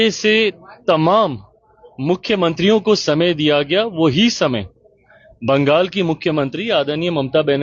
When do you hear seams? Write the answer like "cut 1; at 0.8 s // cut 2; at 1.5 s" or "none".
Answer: none